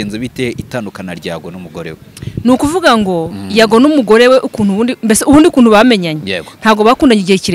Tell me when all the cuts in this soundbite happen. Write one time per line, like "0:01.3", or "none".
none